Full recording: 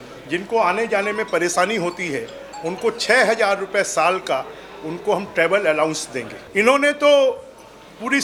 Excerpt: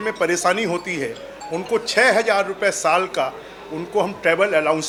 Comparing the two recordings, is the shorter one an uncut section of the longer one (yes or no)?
yes